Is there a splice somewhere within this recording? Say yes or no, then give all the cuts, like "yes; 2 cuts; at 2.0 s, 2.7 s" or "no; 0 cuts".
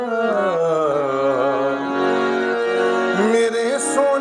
no; 0 cuts